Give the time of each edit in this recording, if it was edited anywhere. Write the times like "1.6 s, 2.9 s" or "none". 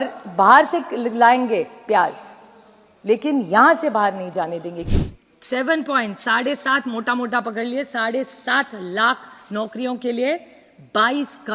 4.9 s